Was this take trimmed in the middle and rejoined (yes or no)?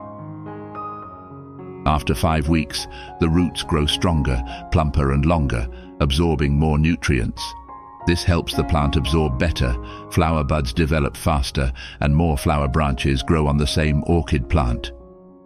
no